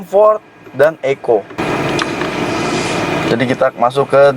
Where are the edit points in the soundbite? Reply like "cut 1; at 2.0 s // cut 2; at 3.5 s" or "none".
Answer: cut 1; at 1.6 s